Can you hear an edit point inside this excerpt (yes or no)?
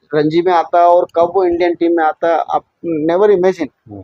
no